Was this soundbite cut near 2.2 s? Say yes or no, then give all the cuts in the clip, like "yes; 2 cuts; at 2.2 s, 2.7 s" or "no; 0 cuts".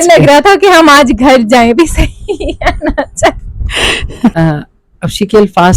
no; 1 cut; at 4.3 s